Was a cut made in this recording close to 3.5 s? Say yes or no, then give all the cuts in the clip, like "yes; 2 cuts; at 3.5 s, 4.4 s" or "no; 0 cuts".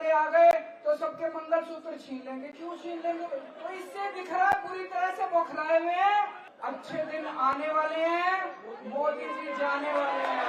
yes; 2 cuts; at 3.5 s, 6.5 s